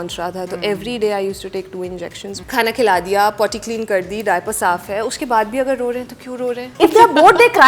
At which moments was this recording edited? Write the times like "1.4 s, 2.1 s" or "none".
2.4 s, 6.7 s